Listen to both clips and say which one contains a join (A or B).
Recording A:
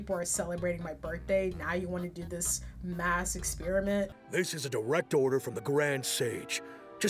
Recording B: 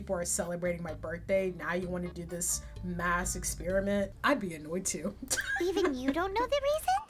A